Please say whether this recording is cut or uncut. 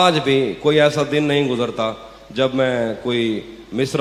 uncut